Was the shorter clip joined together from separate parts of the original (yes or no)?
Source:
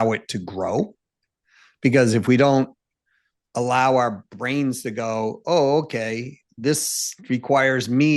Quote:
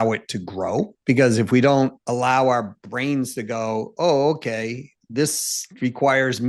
yes